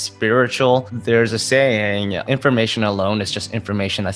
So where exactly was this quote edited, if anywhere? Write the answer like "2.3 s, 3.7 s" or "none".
0.9 s